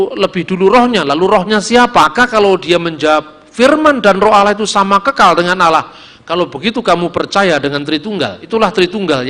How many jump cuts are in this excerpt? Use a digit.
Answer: 2